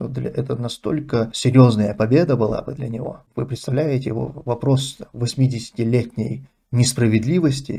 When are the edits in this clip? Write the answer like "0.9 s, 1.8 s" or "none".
1.3 s, 3.2 s